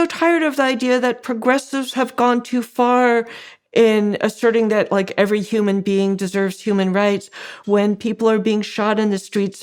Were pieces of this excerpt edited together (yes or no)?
no